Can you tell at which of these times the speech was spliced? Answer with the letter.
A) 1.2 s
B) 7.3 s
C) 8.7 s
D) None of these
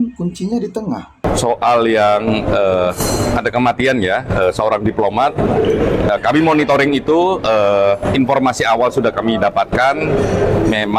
A